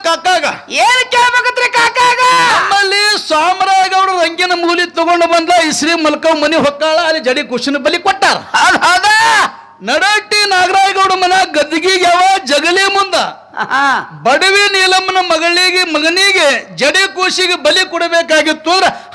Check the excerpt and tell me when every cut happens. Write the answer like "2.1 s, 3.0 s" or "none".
none